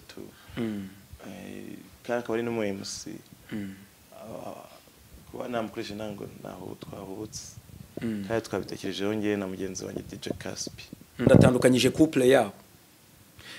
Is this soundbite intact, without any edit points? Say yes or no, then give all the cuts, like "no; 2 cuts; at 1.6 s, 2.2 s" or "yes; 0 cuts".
no; 1 cut; at 11.2 s